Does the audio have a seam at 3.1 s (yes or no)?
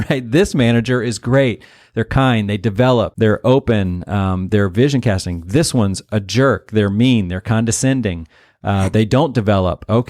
yes